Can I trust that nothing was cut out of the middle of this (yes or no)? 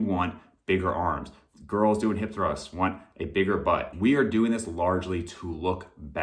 yes